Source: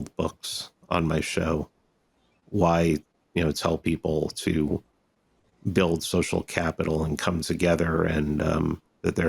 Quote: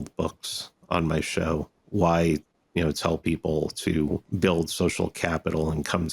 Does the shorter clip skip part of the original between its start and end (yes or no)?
yes